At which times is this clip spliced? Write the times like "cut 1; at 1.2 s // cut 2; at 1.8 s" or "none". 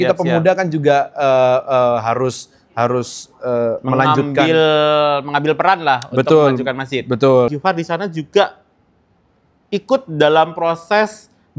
cut 1; at 7.5 s

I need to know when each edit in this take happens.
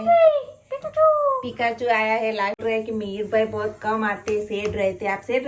cut 1; at 2.6 s

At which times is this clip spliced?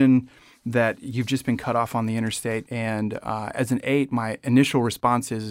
cut 1; at 2.7 s

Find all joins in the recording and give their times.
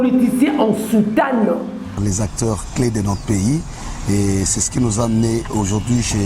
cut 1; at 2.0 s

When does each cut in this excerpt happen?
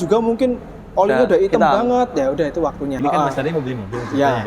cut 1; at 3.0 s

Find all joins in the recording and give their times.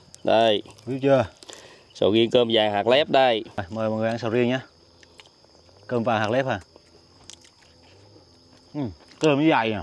cut 1; at 3.6 s

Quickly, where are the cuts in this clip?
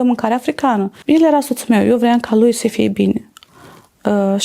cut 1; at 0.9 s

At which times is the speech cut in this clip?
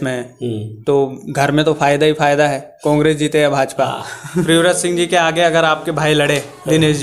cut 1; at 4.4 s

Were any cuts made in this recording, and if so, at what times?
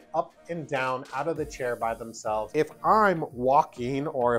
cut 1; at 2.5 s

